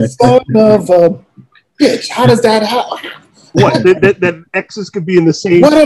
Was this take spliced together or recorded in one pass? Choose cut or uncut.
uncut